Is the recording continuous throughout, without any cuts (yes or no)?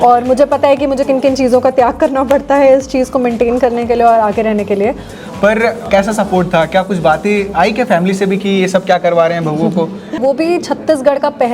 no